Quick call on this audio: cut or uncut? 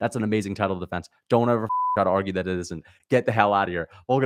uncut